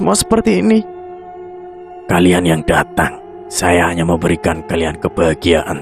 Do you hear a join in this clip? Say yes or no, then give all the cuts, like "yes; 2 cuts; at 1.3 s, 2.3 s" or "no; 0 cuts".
no; 0 cuts